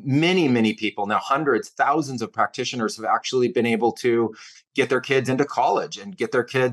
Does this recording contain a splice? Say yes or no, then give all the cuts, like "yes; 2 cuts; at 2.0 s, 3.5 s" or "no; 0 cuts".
no; 0 cuts